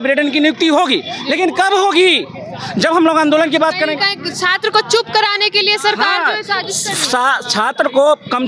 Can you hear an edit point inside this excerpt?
no; 0 cuts

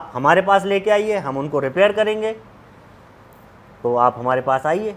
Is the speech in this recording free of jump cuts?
yes; 0 cuts

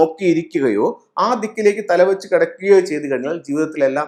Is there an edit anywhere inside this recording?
no; 0 cuts

